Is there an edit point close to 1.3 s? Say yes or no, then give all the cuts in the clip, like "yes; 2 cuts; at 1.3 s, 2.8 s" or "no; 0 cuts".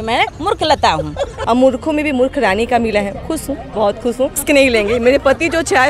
yes; 2 cuts; at 1.3 s, 4.4 s